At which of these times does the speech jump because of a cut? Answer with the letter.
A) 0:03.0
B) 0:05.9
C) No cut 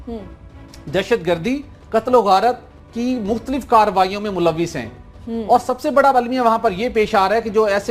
A